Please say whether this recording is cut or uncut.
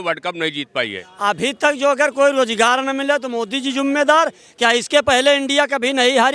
cut